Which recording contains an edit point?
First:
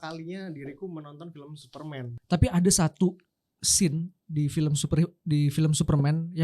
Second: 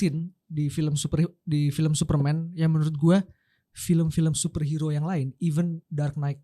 first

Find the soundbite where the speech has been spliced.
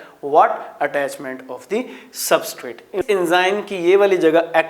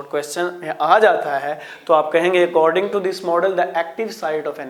first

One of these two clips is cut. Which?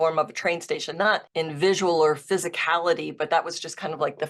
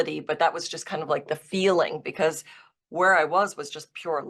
first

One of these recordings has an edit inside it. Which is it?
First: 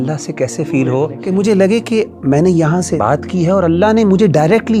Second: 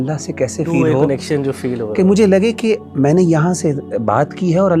first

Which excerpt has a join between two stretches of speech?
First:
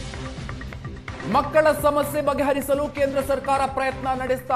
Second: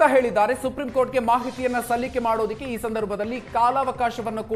first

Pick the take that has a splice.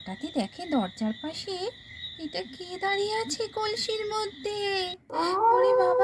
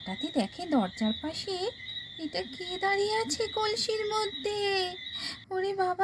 first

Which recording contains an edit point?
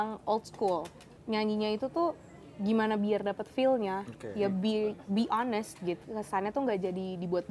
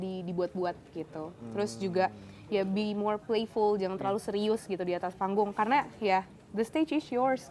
first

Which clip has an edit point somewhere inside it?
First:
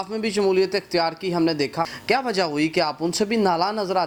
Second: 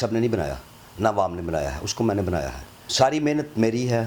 second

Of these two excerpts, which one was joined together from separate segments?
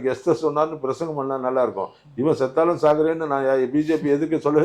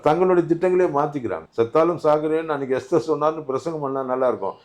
second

